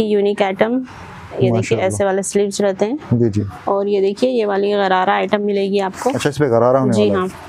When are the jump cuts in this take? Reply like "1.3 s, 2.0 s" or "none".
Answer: none